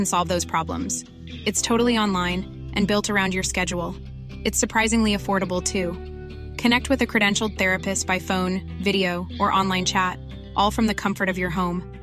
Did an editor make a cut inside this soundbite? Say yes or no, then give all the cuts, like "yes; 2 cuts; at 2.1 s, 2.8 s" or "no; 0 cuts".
no; 0 cuts